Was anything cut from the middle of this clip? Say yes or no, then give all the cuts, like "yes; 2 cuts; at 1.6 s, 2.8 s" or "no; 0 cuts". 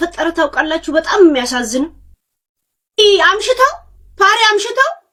no; 0 cuts